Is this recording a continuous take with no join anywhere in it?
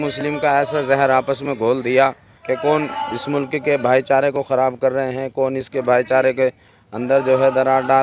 no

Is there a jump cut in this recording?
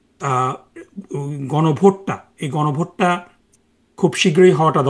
no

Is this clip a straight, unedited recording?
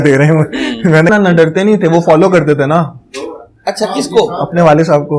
no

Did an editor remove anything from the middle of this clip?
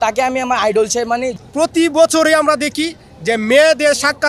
yes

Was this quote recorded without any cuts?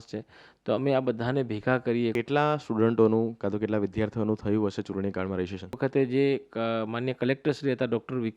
no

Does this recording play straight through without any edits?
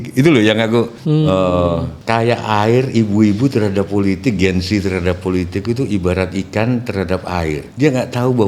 no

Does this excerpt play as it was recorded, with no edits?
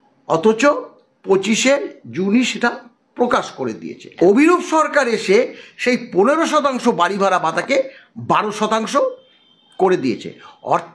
no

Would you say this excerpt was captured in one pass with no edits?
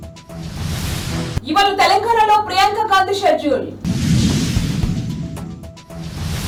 yes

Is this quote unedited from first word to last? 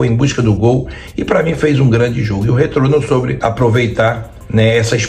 no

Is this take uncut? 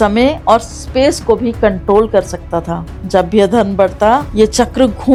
yes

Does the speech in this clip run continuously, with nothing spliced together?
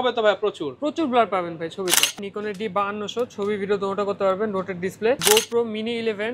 no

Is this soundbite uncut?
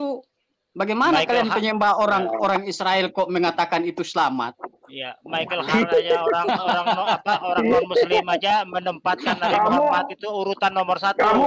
yes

